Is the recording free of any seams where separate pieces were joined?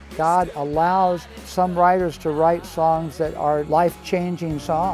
no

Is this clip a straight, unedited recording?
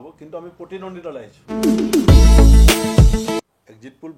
no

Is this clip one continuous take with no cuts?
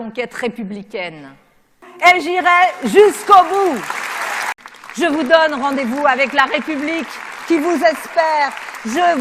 yes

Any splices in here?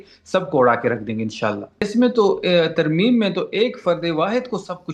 yes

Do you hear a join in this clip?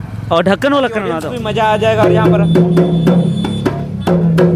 yes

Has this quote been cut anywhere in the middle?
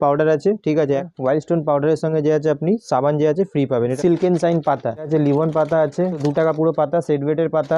yes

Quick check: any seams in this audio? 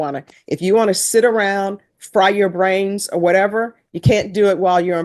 no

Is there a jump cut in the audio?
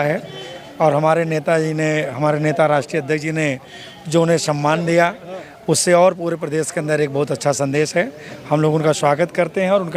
no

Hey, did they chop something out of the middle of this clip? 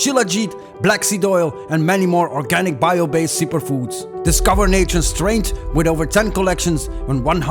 no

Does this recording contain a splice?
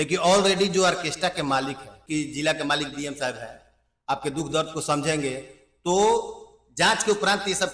yes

